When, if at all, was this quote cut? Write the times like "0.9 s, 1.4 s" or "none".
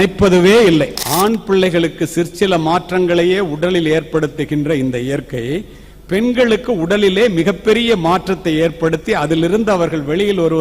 1.0 s